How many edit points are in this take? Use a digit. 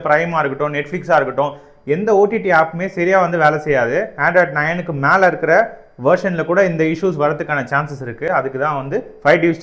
1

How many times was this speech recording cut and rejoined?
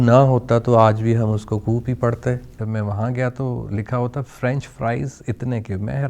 1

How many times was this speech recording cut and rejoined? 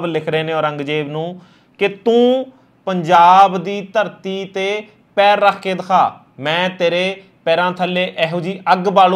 0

